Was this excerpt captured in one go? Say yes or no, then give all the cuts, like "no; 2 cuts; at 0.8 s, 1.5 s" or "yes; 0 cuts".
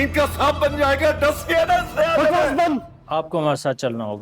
no; 1 cut; at 2.9 s